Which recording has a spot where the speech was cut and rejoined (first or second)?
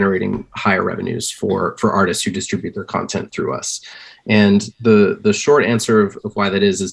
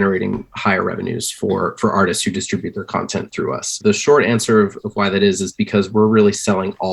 second